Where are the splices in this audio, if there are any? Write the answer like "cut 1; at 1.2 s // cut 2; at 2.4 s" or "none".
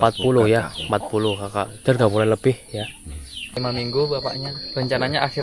cut 1; at 3.6 s